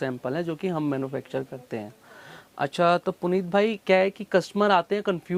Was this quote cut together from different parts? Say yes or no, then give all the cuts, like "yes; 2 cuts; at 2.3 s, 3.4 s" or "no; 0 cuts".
no; 0 cuts